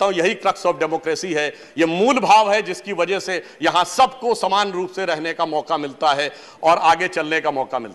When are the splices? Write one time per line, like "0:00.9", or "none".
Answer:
none